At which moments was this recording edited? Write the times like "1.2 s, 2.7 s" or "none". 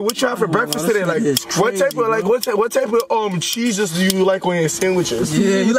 none